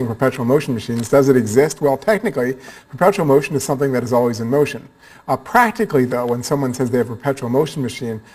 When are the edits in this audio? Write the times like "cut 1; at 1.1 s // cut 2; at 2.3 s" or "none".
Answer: cut 1; at 5.6 s

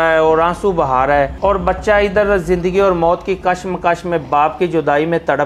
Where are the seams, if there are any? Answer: cut 1; at 1.3 s

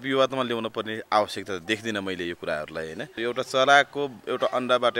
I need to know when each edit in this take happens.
cut 1; at 3.1 s

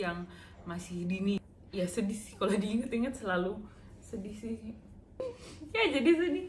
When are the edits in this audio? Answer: cut 1; at 1.4 s // cut 2; at 5.3 s

